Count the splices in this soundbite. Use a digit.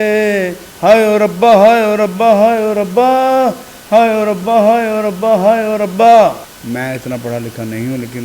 1